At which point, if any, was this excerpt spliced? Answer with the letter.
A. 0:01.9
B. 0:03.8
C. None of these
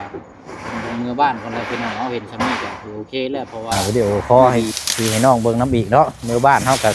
B